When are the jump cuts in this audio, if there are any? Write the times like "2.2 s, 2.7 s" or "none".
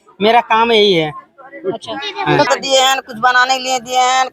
2.5 s

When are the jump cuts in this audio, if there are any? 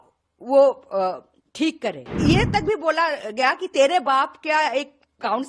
2.1 s

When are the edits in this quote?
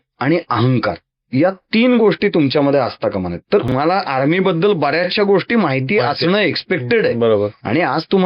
3.7 s

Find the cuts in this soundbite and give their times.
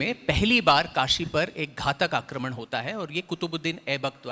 none

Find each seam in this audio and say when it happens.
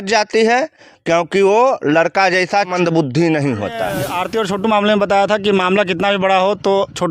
2.7 s, 4.1 s

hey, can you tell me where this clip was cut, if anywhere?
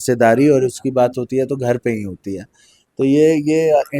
none

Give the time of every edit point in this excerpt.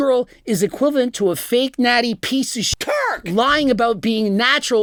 none

